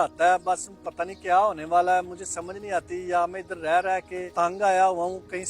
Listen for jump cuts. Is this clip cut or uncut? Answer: cut